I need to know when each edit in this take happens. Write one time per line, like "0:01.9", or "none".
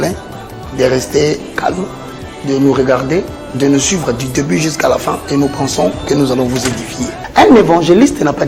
0:07.1